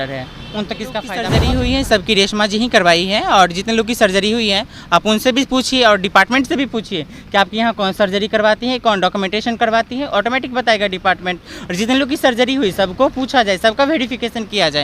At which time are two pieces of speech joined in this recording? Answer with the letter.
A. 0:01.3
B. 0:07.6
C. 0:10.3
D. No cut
A